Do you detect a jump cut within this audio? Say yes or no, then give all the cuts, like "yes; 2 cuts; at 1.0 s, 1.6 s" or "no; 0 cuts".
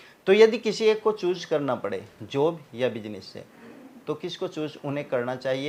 no; 0 cuts